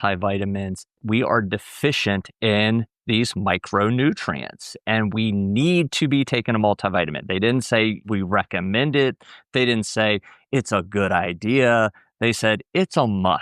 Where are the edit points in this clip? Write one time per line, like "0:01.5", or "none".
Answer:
0:01.0